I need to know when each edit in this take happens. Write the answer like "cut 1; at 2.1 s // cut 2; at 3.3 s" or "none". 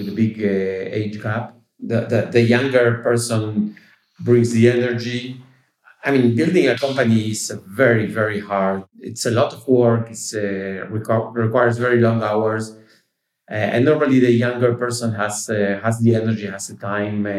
cut 1; at 1.9 s